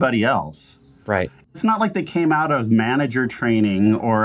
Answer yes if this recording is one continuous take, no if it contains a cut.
yes